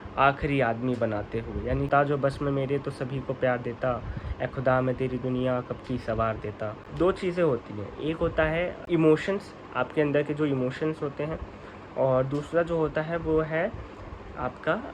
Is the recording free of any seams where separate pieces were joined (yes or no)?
no